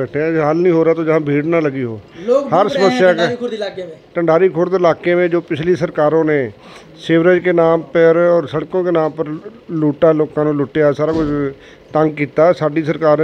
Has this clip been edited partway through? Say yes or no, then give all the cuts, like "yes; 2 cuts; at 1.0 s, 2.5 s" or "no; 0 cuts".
no; 0 cuts